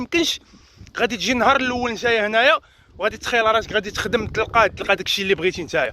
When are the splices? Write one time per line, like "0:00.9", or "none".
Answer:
0:04.8